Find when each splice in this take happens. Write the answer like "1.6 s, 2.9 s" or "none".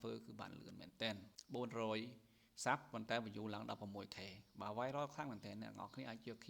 1.3 s